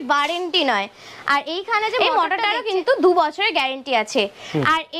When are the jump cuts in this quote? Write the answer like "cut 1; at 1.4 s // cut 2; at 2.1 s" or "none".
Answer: cut 1; at 2.0 s